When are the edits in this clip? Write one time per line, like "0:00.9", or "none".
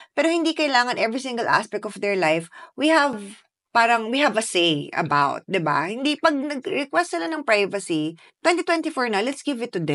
none